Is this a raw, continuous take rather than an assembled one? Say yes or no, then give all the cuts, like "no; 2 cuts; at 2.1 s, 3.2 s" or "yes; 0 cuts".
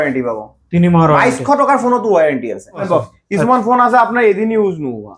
no; 1 cut; at 2.8 s